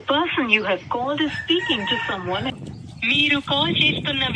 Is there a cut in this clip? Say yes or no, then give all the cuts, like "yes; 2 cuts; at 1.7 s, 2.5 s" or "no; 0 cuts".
yes; 1 cut; at 2.5 s